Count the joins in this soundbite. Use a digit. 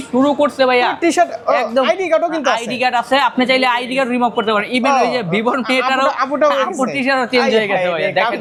0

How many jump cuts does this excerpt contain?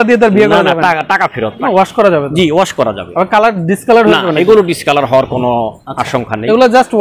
1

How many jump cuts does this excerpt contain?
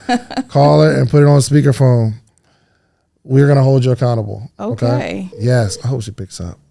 1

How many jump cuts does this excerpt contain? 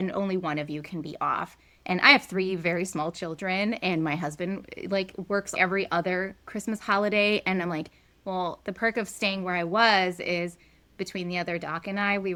0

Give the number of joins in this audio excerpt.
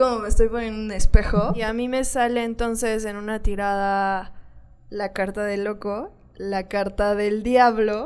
1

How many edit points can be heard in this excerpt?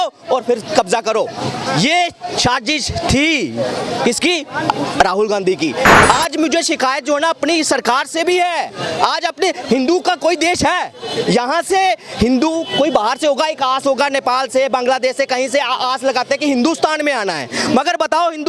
1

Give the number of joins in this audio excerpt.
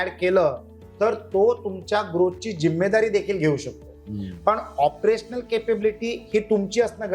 0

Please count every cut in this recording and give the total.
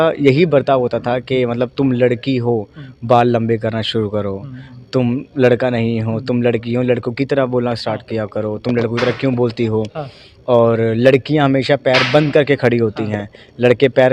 0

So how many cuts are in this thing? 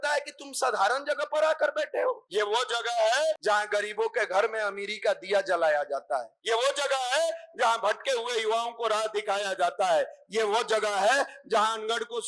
3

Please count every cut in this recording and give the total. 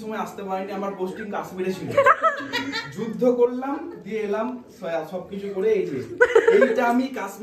0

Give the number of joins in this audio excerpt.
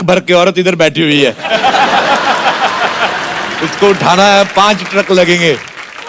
0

